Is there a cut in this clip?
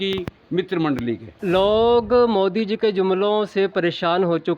yes; 1 cut; at 1.3 s

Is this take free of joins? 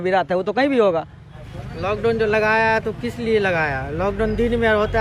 no; 1 cut; at 1.3 s

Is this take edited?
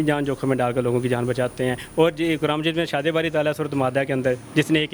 no; 0 cuts

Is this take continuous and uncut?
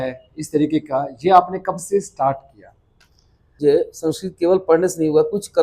no; 1 cut; at 3.6 s

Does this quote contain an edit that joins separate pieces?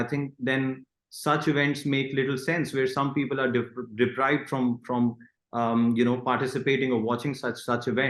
no; 0 cuts

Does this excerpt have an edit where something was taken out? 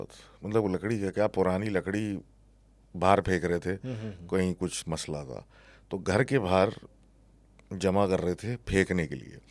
no; 0 cuts

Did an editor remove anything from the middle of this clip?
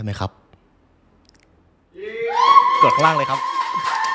no; 0 cuts

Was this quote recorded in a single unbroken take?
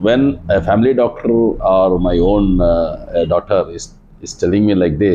yes; 0 cuts

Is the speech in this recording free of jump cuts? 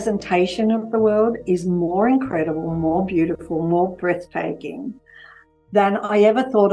yes; 0 cuts

